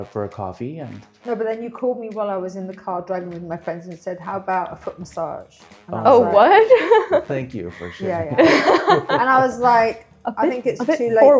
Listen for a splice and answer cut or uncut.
uncut